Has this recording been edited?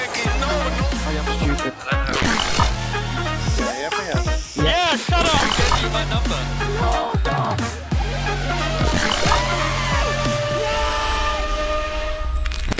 no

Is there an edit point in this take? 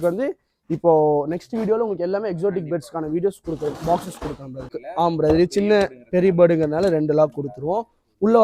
yes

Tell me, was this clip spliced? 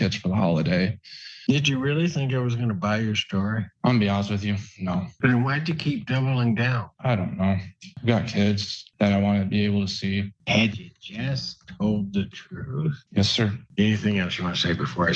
yes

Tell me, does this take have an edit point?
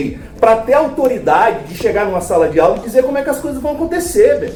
no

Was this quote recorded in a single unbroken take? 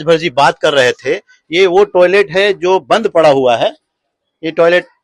yes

